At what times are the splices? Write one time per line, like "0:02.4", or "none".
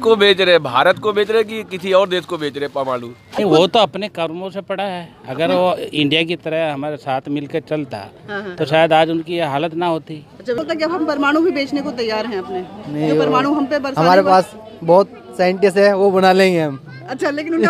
0:03.3
0:10.6